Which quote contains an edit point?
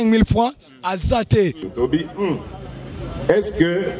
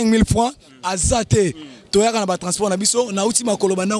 first; 1 cut; at 1.7 s

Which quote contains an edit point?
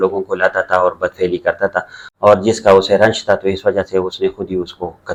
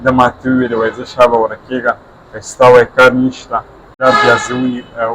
second; 1 cut; at 4.0 s

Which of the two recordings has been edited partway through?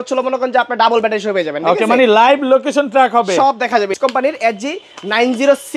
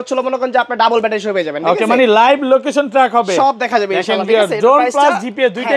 first; 1 cut; at 3.9 s

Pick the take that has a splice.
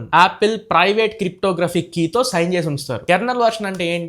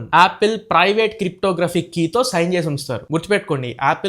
first; 1 cut; at 2.9 s

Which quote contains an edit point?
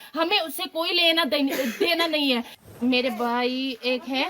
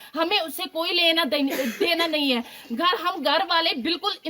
first; 1 cut; at 2.7 s

